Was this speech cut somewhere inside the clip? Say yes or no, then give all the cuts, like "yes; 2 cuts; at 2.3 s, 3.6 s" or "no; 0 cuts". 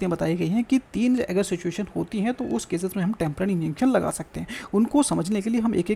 no; 0 cuts